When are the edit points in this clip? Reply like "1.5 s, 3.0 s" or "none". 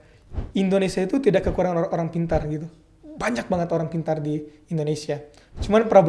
none